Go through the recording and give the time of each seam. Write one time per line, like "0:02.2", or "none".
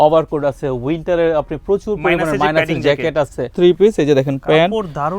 0:03.5

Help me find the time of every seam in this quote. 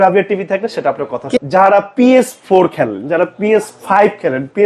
0:01.3

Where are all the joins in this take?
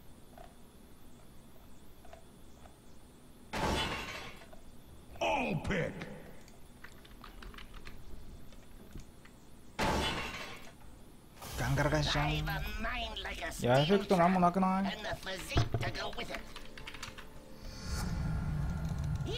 0:14.3

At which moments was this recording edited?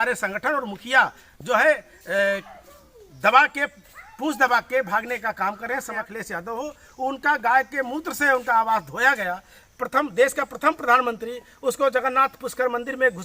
0:06.0

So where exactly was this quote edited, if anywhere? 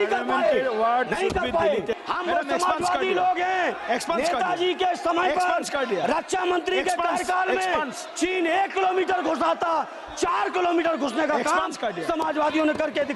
0:02.0

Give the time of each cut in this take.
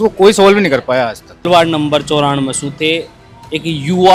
0:01.5

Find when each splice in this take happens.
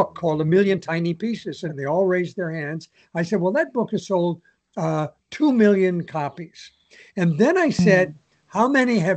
0:01.7

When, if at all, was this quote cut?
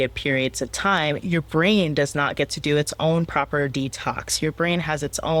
none

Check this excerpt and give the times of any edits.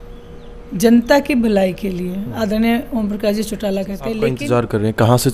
0:04.3

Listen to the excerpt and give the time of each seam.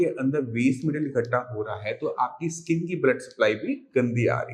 none

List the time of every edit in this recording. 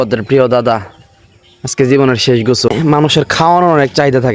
0:02.7

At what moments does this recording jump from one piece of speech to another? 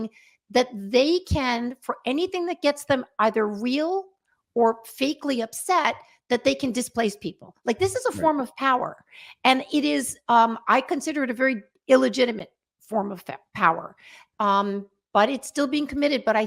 none

